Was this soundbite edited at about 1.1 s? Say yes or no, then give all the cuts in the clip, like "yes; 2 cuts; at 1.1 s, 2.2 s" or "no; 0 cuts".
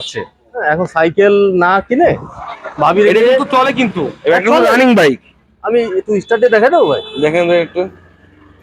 no; 0 cuts